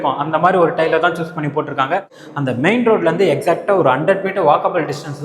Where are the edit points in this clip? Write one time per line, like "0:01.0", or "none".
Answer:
0:02.2